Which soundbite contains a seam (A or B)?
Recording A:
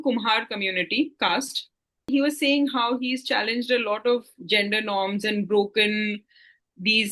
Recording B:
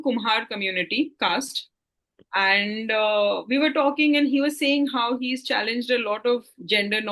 A